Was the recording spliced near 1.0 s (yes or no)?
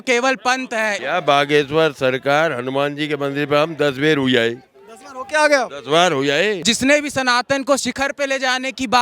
yes